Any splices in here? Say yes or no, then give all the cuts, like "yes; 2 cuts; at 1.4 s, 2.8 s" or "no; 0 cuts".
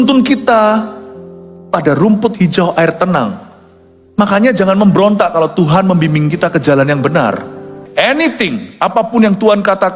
yes; 1 cut; at 7.7 s